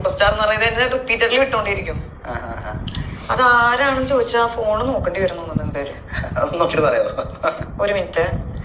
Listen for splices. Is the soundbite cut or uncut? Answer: uncut